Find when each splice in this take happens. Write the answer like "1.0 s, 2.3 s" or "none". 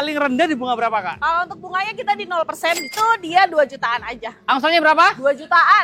2.9 s